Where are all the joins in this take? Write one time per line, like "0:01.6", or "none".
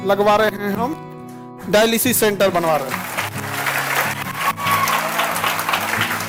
none